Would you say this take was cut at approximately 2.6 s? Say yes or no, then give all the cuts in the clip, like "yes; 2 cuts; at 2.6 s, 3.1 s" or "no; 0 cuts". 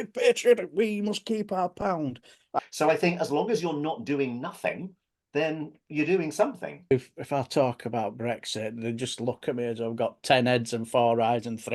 yes; 2 cuts; at 2.6 s, 6.9 s